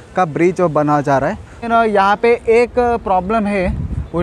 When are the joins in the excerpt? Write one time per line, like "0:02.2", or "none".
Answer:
0:01.7